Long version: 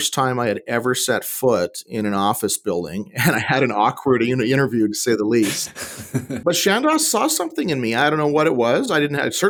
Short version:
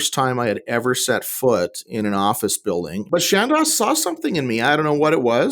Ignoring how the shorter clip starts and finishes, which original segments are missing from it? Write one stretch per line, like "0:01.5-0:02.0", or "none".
0:03.0-0:06.3